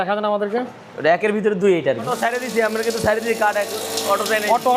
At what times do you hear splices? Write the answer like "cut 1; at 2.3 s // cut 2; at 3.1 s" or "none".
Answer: cut 1; at 2.1 s